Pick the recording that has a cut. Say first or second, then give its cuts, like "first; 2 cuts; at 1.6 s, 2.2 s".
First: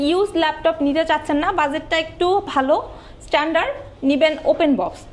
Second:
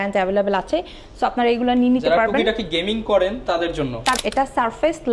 second; 1 cut; at 4.2 s